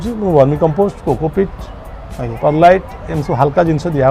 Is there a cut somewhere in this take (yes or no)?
no